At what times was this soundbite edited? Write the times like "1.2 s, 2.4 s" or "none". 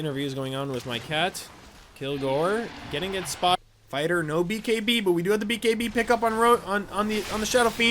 3.6 s